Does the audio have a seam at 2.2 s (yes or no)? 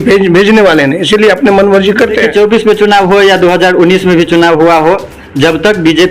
yes